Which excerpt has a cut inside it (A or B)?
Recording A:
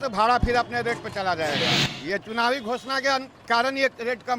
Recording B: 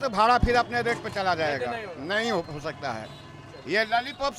A